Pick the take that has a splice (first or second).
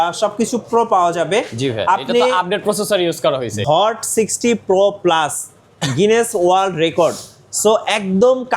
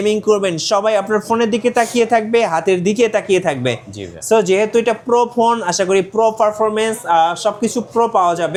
first